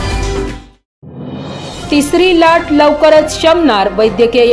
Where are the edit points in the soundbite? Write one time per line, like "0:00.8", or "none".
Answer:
0:01.7